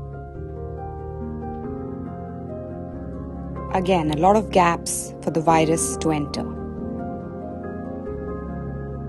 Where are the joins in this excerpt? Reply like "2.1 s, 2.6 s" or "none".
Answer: 1.5 s